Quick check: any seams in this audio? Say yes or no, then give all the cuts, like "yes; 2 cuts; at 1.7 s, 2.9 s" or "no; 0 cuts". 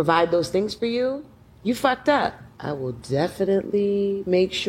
yes; 1 cut; at 2.5 s